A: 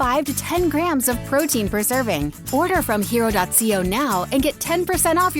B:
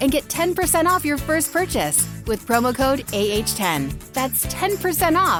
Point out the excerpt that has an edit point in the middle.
A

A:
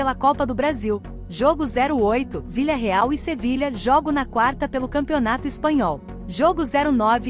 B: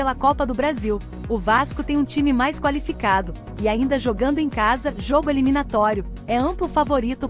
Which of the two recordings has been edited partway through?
A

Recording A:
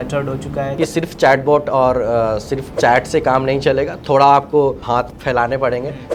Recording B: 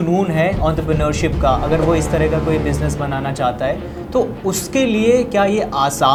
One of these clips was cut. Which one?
A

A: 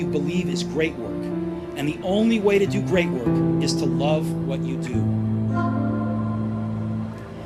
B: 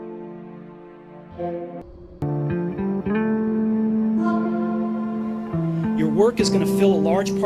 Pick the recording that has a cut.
B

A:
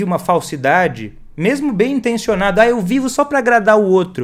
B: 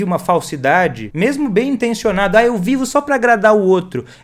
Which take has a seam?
B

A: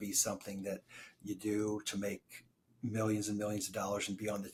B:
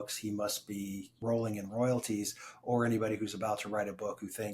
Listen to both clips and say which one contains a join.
B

